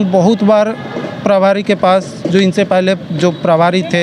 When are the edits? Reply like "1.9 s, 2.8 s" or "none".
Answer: none